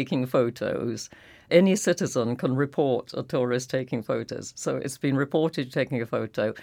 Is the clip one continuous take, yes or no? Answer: no